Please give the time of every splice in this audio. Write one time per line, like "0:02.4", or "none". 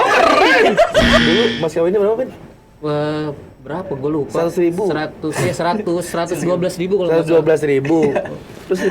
0:01.2